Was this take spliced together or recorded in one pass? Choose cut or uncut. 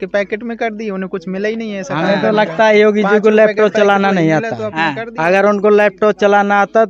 uncut